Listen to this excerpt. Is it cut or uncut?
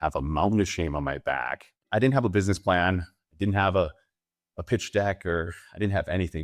cut